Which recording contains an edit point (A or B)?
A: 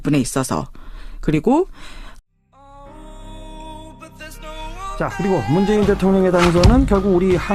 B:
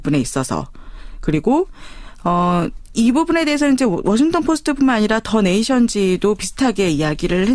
B